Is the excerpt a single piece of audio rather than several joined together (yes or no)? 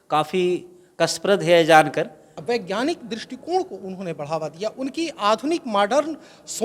no